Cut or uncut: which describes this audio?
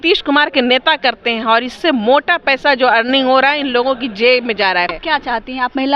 cut